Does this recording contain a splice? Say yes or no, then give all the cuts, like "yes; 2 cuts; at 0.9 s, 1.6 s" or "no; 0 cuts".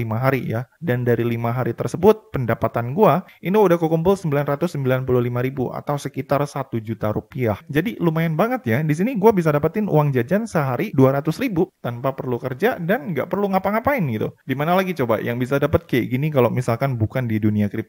no; 0 cuts